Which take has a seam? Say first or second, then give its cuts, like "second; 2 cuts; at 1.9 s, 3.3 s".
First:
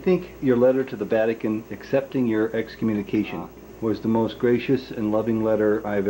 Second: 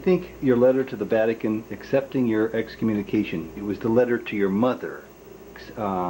first; 1 cut; at 3.5 s